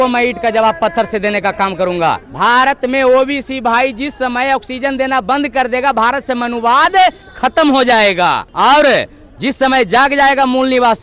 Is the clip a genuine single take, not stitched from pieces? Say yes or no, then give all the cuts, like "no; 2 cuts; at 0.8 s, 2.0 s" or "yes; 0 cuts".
no; 2 cuts; at 2.3 s, 8.5 s